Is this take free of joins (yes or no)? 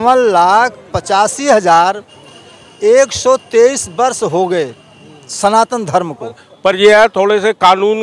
no